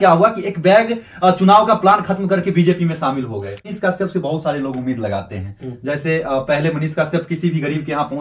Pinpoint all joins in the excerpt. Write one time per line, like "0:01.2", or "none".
0:03.7